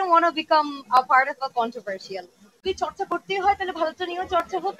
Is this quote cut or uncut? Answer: cut